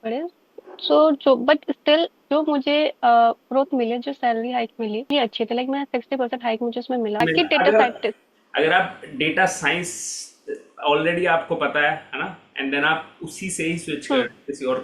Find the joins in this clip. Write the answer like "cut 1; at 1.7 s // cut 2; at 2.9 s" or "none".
cut 1; at 5.1 s // cut 2; at 7.2 s